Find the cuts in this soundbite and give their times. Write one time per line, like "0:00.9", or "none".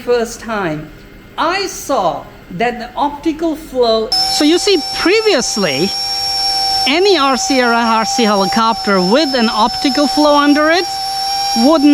0:04.1